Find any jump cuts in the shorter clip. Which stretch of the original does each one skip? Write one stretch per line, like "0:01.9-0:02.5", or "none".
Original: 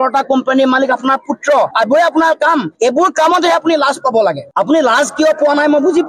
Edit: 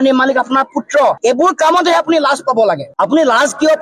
0:01.7-0:02.7